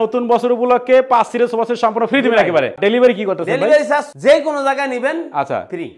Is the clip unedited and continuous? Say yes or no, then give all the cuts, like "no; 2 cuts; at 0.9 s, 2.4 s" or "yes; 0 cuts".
no; 1 cut; at 2.8 s